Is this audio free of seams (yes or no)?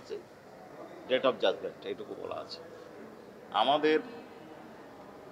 yes